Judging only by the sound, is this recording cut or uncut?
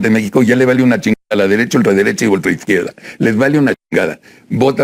uncut